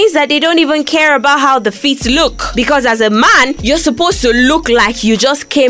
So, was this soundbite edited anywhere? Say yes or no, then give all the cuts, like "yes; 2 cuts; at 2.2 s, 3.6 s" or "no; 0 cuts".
yes; 2 cuts; at 2.4 s, 3.6 s